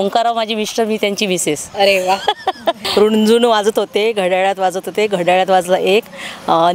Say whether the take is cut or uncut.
cut